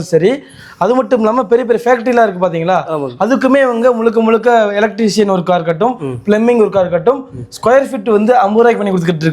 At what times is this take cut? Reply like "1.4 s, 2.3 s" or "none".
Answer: none